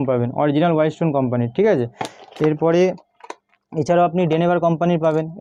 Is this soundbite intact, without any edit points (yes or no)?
yes